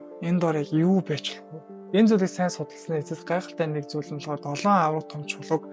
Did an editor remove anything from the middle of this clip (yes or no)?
no